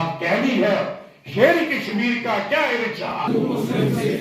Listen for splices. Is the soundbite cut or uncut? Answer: uncut